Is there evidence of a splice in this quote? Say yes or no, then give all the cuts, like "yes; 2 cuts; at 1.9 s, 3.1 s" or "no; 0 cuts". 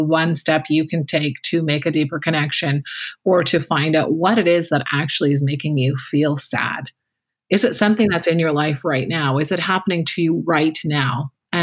no; 0 cuts